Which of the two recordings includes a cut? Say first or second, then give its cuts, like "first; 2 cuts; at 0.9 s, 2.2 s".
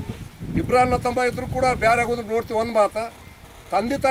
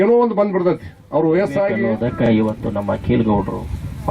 second; 1 cut; at 2.2 s